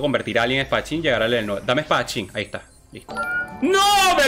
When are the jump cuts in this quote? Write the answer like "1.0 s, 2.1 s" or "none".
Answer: 3.1 s